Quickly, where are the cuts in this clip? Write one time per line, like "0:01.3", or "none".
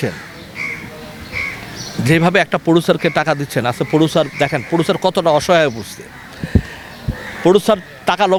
none